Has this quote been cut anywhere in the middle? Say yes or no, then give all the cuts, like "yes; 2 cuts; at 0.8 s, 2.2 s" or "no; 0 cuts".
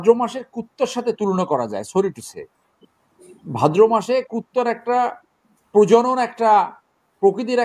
no; 0 cuts